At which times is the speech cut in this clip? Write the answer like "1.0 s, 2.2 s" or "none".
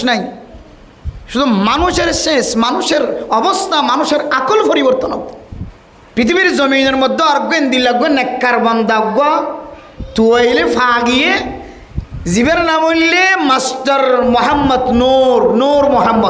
5.7 s

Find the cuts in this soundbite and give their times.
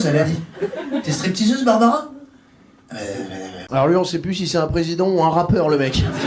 3.5 s

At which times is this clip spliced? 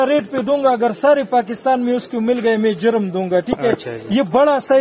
none

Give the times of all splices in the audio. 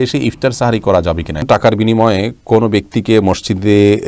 1.4 s

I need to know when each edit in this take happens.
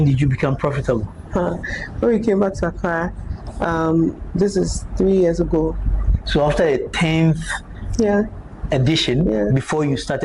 none

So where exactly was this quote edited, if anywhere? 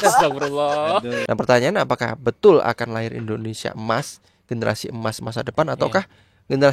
1.2 s

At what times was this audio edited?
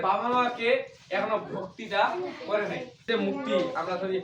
3.1 s

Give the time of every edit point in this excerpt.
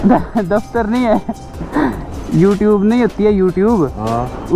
none

